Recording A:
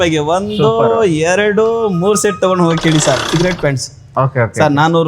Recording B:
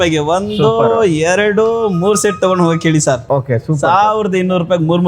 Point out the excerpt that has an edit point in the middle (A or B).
A